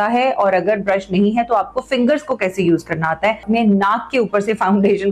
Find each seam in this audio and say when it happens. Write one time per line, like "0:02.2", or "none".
0:03.4